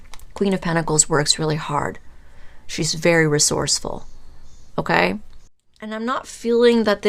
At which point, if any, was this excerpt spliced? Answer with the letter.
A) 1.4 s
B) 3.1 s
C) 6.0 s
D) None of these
C